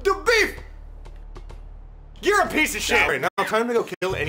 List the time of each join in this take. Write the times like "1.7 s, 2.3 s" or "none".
3.1 s